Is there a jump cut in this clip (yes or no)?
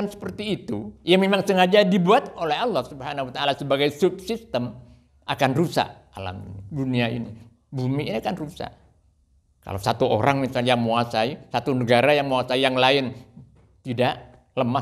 yes